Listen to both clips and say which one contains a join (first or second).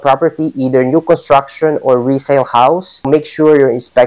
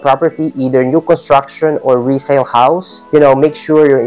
first